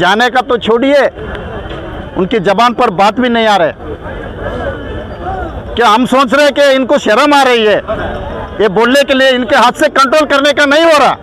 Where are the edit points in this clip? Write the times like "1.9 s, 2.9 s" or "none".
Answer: none